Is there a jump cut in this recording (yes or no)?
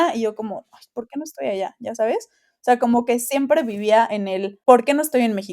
yes